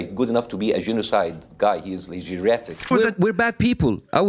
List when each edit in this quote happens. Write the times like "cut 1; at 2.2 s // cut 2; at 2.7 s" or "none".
cut 1; at 2.9 s

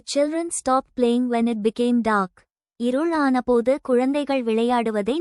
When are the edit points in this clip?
none

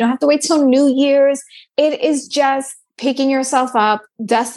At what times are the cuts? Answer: cut 1; at 1.5 s // cut 2; at 2.8 s

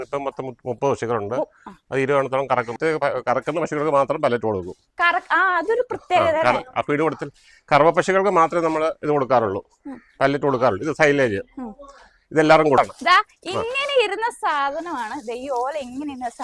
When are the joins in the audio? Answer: cut 1; at 2.7 s // cut 2; at 12.8 s

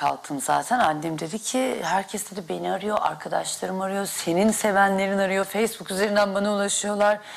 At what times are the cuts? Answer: cut 1; at 4.4 s

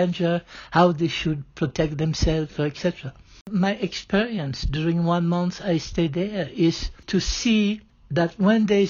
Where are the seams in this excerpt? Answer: cut 1; at 3.4 s // cut 2; at 7.0 s // cut 3; at 7.9 s

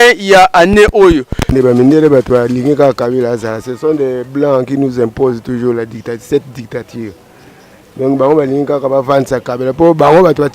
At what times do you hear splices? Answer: cut 1; at 1.5 s

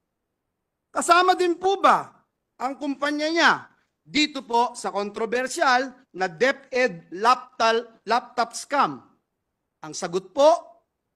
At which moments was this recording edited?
none

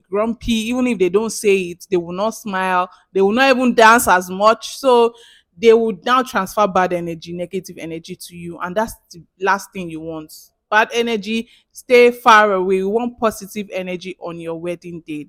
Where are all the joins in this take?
none

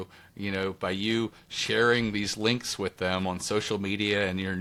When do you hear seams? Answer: none

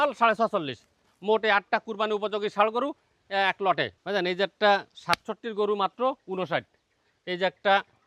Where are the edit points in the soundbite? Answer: cut 1; at 4.0 s

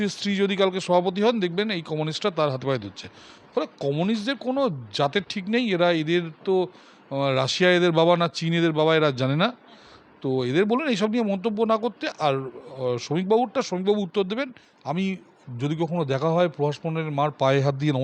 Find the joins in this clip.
cut 1; at 14.7 s

